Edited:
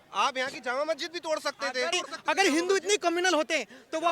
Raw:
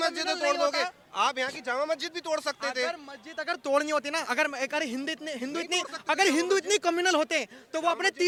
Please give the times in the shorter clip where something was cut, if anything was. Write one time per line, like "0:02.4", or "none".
0:01.9